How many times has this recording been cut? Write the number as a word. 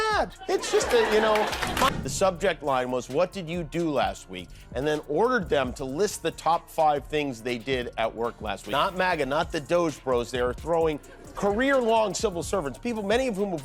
two